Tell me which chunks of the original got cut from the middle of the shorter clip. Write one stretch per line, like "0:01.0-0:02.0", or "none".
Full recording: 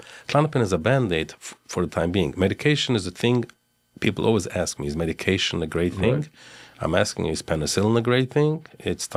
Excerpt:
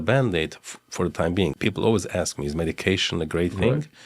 0:02.3-0:04.0